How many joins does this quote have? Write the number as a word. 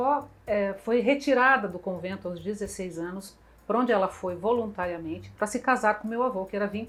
zero